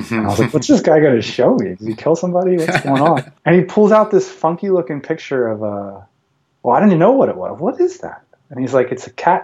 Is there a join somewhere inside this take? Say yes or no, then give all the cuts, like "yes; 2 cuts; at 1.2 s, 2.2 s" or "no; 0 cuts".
yes; 1 cut; at 3.3 s